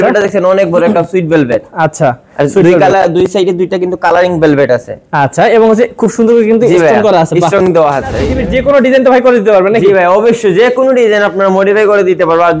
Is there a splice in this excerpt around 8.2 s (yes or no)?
yes